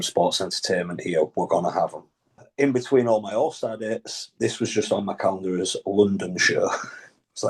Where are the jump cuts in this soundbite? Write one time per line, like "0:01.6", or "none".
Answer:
0:02.4